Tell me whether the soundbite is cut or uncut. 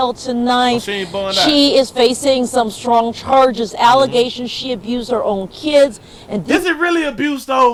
uncut